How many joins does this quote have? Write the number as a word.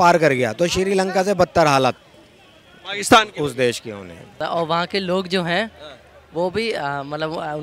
one